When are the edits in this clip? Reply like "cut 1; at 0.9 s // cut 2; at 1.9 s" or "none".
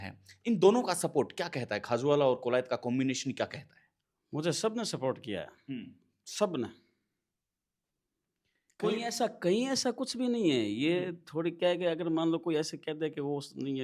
none